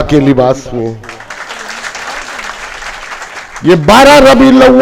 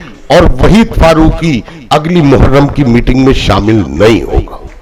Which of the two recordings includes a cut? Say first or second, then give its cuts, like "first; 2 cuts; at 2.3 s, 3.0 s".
first; 1 cut; at 3.5 s